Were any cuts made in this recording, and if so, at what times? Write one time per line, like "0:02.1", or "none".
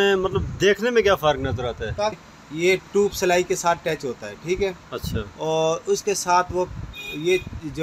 0:02.2